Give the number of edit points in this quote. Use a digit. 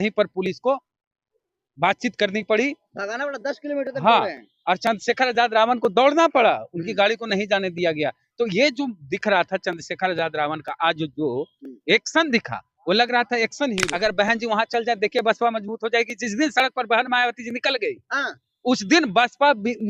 1